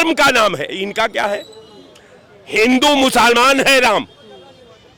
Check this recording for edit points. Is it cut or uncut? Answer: uncut